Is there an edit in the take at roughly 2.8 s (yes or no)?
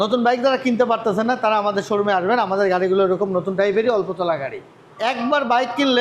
no